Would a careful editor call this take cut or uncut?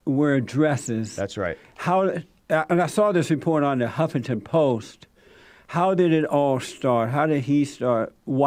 uncut